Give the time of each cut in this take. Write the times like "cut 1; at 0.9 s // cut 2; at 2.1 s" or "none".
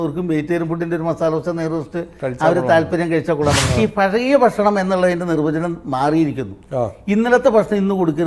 cut 1; at 3.6 s